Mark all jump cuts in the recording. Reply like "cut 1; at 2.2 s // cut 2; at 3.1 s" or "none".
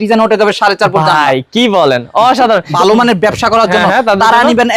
cut 1; at 2.7 s